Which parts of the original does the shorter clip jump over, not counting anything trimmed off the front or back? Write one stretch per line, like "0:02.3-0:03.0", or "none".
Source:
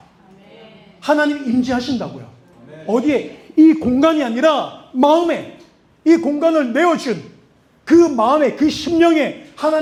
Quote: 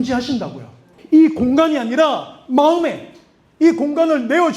0:02.5-0:03.4